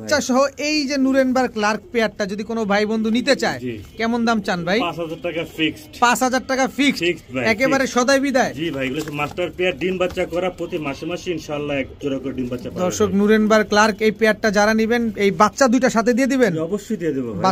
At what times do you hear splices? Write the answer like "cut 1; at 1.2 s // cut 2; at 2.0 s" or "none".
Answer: none